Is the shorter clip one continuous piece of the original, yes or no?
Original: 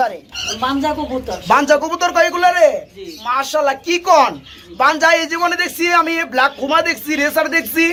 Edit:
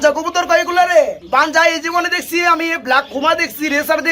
no